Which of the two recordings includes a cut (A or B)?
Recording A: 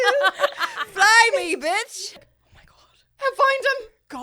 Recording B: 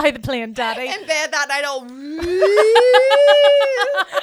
A